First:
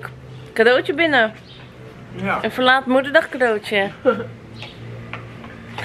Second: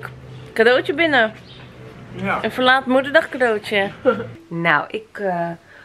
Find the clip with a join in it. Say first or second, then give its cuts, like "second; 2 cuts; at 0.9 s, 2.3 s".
second; 1 cut; at 4.4 s